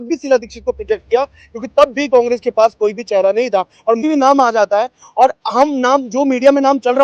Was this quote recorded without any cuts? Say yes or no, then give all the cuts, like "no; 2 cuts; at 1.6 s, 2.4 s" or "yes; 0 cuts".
no; 1 cut; at 4.0 s